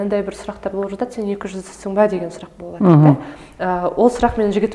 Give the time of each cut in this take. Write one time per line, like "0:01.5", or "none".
none

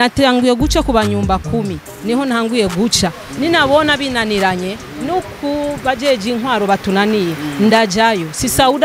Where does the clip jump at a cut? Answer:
none

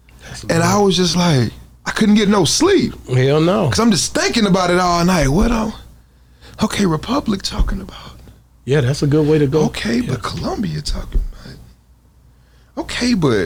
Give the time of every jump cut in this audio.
none

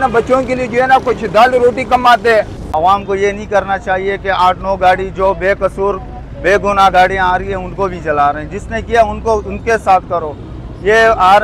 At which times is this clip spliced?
0:02.6

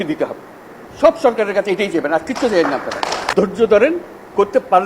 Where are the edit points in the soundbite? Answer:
0:03.2

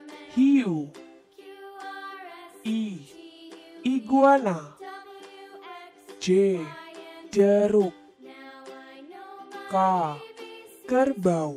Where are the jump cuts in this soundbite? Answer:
none

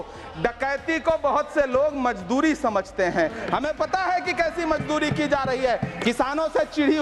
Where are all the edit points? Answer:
0:05.9

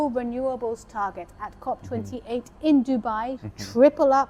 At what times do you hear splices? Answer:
0:03.4

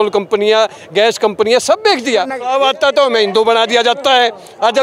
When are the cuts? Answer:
0:02.4

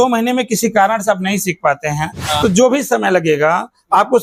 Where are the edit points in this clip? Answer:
none

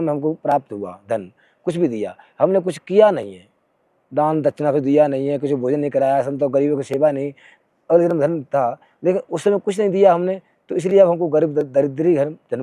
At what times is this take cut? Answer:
none

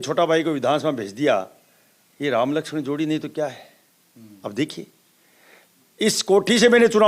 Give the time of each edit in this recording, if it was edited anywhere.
none

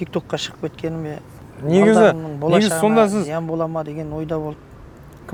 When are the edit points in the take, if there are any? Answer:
none

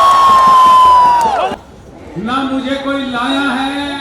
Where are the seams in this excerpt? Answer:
0:01.5

